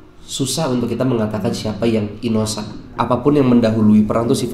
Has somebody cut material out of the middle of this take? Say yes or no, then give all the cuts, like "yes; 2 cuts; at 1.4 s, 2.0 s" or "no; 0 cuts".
yes; 1 cut; at 2.8 s